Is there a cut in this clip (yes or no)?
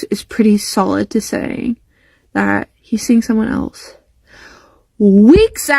no